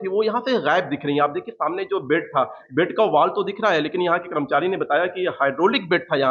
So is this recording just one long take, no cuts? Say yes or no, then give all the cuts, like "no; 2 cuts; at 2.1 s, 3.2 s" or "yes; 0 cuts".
yes; 0 cuts